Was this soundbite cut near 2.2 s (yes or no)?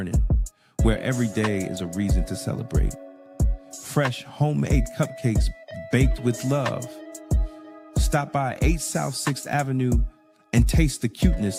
no